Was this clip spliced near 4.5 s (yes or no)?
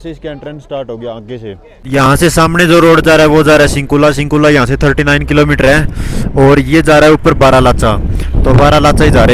no